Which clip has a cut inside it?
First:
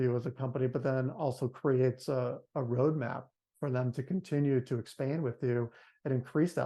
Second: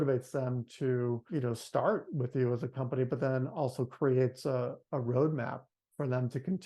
second; 1 cut; at 1.2 s

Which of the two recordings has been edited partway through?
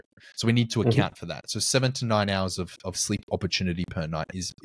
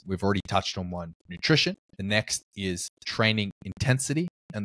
second; 1 cut; at 1.9 s

